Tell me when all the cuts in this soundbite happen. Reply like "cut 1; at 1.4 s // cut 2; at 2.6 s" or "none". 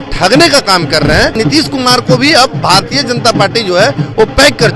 cut 1; at 1.3 s

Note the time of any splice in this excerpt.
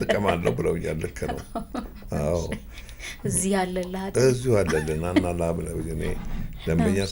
none

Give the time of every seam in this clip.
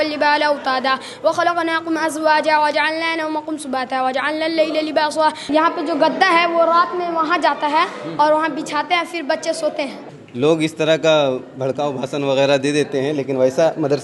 cut 1; at 5.4 s // cut 2; at 10.1 s

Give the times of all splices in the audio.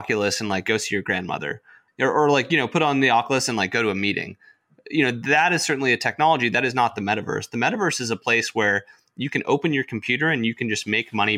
cut 1; at 1.8 s

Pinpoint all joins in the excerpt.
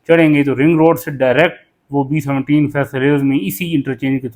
none

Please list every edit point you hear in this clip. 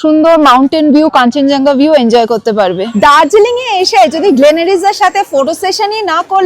cut 1; at 2.9 s

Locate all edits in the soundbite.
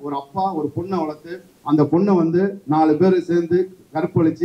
none

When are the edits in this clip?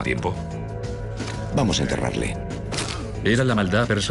none

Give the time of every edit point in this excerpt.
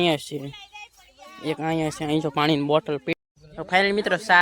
cut 1; at 3.1 s

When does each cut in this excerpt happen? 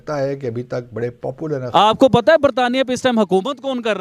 cut 1; at 1.6 s

